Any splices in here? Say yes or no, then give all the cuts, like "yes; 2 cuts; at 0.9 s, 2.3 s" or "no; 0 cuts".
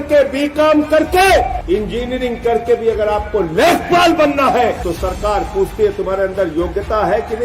yes; 2 cuts; at 1.6 s, 4.8 s